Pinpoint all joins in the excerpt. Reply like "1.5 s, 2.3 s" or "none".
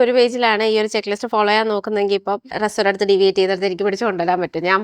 2.5 s